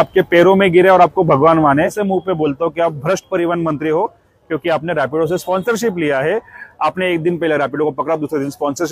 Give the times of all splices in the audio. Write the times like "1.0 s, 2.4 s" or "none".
2.0 s